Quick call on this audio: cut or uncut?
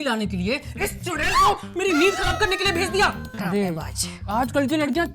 cut